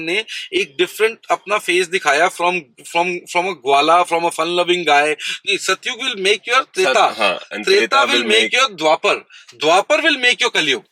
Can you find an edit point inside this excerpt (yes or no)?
yes